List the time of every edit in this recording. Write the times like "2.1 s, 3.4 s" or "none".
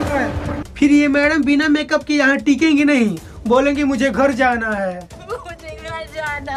none